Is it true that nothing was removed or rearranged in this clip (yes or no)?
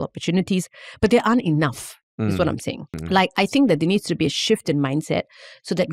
no